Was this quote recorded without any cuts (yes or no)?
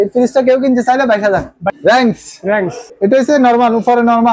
no